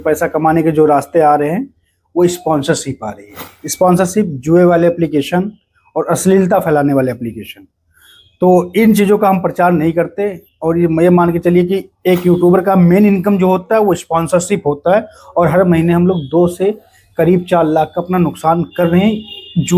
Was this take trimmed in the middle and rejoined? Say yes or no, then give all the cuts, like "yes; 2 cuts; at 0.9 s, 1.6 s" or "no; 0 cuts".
no; 0 cuts